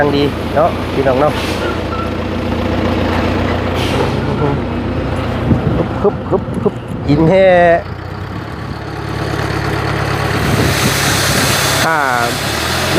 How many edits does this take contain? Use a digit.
1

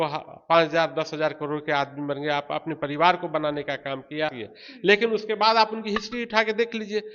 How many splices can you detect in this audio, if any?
1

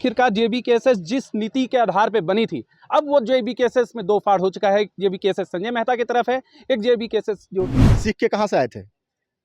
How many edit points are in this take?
1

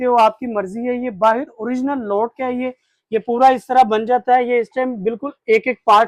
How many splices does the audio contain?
0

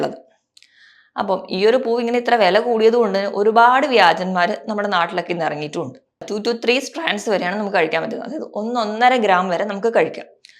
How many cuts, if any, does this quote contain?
1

